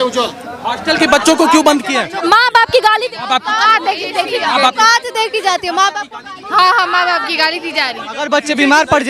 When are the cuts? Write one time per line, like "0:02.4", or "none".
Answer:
0:02.2
0:08.0

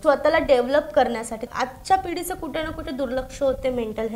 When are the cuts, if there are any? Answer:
0:01.5

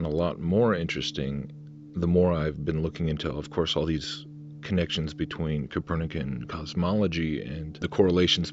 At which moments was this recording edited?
0:06.1

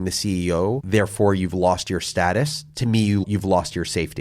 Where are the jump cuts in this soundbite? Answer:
0:03.2

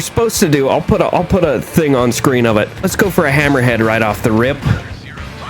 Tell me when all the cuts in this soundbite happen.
0:02.7

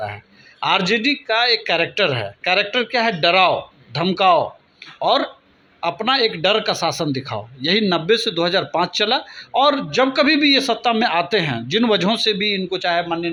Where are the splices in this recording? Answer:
none

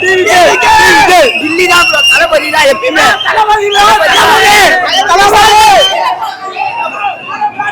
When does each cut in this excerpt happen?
0:01.4
0:05.9

